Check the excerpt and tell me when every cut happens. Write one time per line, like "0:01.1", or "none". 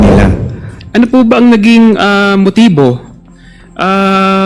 0:01.0